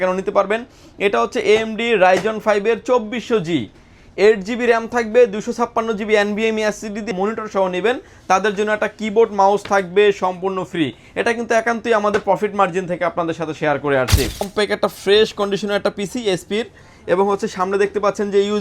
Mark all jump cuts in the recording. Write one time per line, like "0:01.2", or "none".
0:07.1
0:14.4

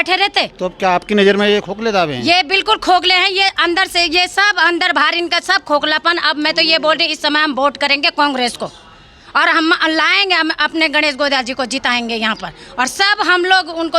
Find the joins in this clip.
none

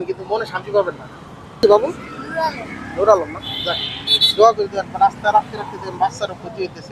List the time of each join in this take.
0:01.6

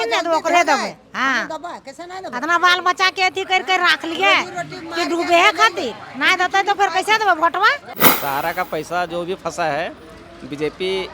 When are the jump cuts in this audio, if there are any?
0:08.0

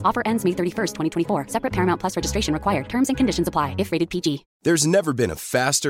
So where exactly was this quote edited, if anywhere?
0:04.5

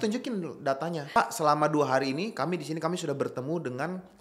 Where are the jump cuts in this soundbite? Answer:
0:01.2

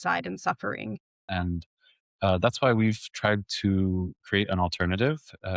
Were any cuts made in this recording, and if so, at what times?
0:01.2

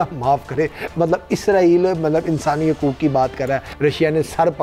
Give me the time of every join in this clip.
0:03.7

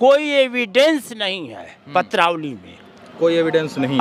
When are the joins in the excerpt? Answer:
none

